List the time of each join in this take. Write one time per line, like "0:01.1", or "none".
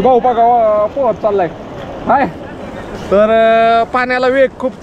none